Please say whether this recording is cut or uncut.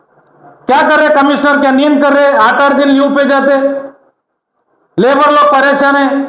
uncut